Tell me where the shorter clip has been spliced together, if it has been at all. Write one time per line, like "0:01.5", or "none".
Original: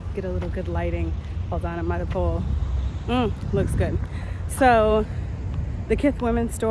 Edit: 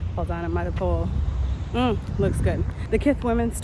0:02.7